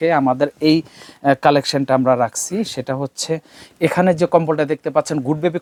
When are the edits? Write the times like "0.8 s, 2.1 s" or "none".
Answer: none